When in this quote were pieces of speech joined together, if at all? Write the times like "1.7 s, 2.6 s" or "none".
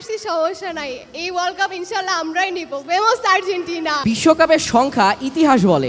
3.9 s

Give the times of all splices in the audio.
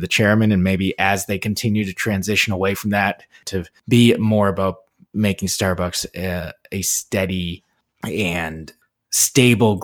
3.4 s

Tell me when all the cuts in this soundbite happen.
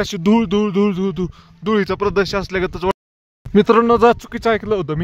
2.9 s

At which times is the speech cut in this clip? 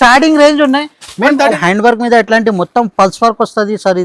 1.6 s

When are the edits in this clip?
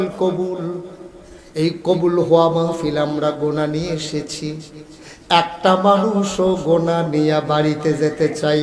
none

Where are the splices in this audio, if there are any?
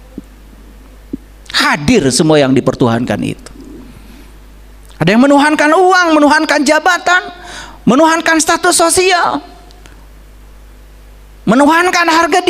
none

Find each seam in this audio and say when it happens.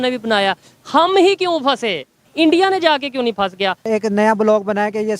2.2 s, 3.9 s

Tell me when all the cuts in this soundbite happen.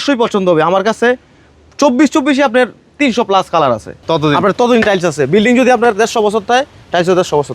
3.9 s

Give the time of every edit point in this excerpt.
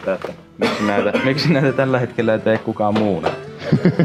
none

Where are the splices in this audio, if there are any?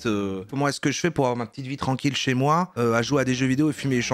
none

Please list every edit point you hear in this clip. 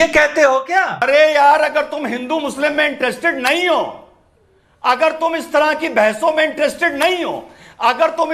1.0 s

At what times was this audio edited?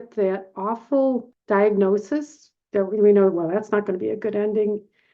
1.3 s

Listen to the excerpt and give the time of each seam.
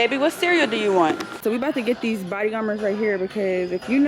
1.3 s

